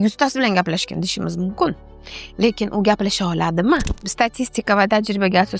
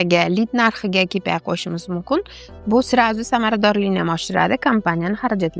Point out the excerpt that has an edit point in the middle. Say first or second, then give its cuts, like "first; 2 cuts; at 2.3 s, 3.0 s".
first; 1 cut; at 4.0 s